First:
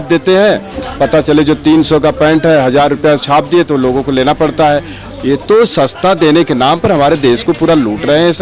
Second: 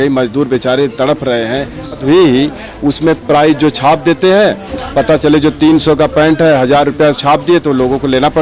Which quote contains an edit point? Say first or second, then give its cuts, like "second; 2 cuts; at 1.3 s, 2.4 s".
second; 1 cut; at 2.0 s